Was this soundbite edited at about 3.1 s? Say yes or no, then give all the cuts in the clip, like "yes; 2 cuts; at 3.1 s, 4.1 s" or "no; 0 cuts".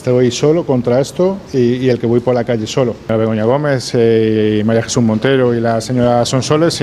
yes; 1 cut; at 3.1 s